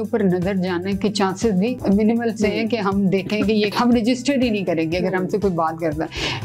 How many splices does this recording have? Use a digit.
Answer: 2